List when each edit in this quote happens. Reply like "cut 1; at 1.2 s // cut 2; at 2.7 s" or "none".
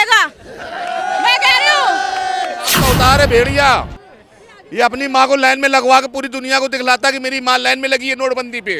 cut 1; at 2.8 s